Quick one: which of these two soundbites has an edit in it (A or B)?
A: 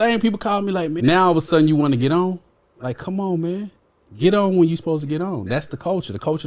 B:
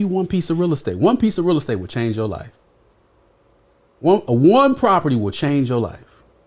A